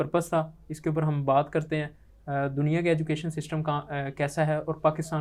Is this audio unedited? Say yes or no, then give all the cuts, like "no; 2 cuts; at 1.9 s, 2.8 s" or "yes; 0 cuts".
yes; 0 cuts